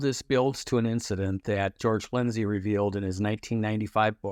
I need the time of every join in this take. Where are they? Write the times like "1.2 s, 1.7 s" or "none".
none